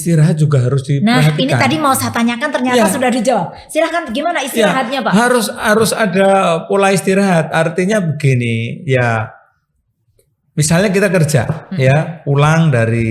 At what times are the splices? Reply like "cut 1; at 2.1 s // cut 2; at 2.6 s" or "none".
none